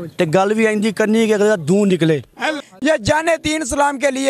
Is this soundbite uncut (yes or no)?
no